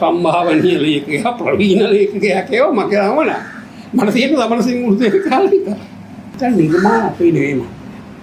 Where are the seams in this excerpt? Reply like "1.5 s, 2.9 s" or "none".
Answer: 6.3 s